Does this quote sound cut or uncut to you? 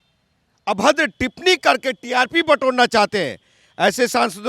uncut